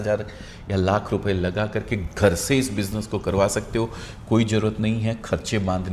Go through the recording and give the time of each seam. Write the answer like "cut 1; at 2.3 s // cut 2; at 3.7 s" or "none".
none